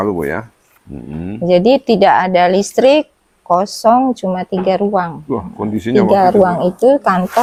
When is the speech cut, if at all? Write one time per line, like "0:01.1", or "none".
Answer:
none